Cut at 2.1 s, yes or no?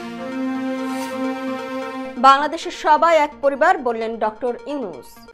no